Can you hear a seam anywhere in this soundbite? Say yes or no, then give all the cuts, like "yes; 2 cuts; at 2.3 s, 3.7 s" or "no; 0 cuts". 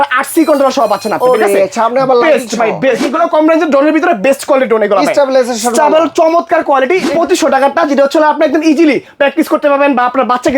yes; 2 cuts; at 3.1 s, 7.1 s